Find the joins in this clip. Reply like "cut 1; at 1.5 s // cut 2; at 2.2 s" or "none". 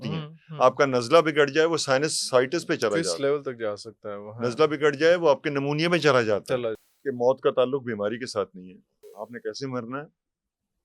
cut 1; at 6.8 s // cut 2; at 9.1 s